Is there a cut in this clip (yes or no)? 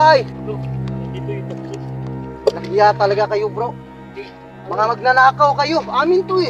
no